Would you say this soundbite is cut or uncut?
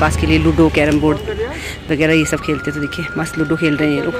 uncut